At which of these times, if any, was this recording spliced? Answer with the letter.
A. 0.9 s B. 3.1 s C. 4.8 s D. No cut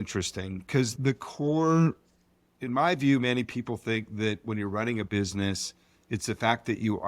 A